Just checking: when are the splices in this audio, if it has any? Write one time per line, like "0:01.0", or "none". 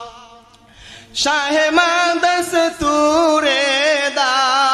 none